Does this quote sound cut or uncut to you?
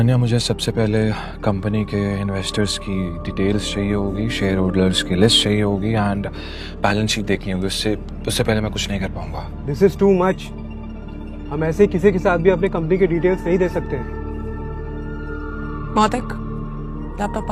uncut